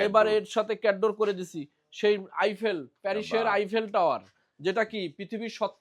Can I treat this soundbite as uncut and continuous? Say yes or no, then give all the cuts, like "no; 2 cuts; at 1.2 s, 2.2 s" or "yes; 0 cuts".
yes; 0 cuts